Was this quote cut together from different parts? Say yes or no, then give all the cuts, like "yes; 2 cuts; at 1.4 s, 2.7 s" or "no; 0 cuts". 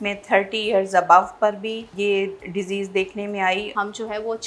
yes; 2 cuts; at 1.9 s, 3.7 s